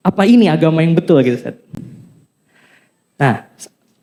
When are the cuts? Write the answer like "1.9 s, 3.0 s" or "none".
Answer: none